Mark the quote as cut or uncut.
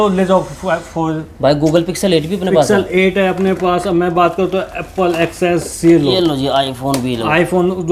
uncut